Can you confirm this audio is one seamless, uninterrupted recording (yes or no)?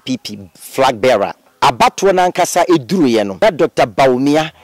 no